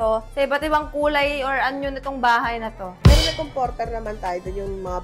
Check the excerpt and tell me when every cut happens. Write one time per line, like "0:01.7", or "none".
0:02.9